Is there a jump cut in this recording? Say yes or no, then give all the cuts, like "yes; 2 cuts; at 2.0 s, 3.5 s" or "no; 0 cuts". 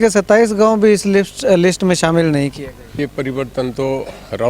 yes; 1 cut; at 2.9 s